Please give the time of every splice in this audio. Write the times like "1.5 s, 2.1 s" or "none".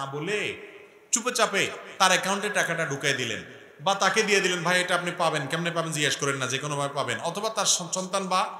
none